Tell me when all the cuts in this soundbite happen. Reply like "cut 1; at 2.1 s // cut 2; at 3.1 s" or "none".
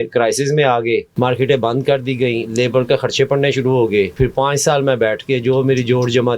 cut 1; at 1.1 s // cut 2; at 4.1 s